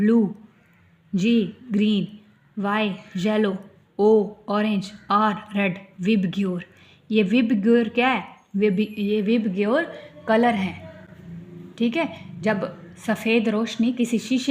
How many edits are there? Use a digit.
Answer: 0